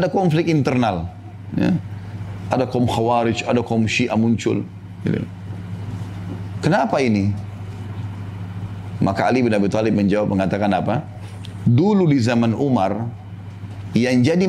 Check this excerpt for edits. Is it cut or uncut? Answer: uncut